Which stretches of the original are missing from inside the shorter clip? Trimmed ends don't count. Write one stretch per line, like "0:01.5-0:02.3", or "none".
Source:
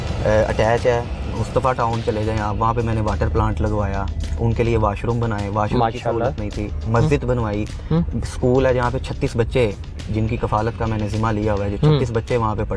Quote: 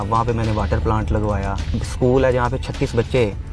0:04.3-0:08.2